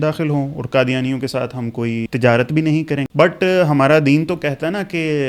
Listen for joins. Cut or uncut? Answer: cut